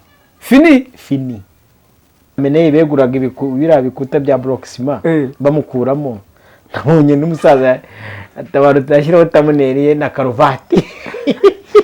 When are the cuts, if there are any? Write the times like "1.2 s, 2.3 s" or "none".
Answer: 2.4 s